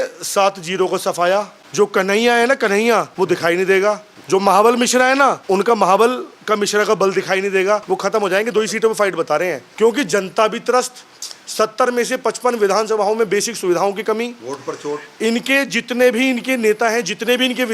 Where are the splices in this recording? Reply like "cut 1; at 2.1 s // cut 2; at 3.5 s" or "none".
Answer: cut 1; at 1.6 s // cut 2; at 3.1 s // cut 3; at 4.1 s // cut 4; at 5.4 s // cut 5; at 7.8 s // cut 6; at 9.6 s